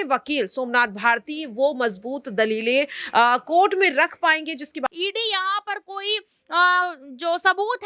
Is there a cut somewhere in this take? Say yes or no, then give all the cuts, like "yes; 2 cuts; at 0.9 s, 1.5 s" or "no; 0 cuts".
yes; 1 cut; at 4.9 s